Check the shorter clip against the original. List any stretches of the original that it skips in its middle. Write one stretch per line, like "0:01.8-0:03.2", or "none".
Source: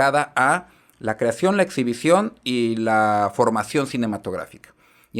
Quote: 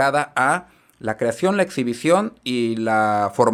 none